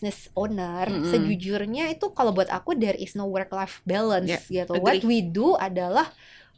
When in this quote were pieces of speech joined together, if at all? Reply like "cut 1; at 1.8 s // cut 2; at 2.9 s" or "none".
none